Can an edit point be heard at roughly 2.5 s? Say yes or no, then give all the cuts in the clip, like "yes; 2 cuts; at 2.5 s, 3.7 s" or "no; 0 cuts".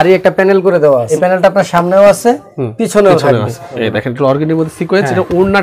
no; 2 cuts; at 1.1 s, 3.7 s